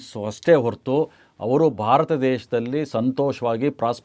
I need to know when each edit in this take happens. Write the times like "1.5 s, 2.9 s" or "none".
none